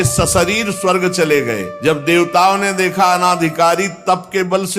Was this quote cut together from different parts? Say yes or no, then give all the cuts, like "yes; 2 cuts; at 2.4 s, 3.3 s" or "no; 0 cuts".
yes; 1 cut; at 1.7 s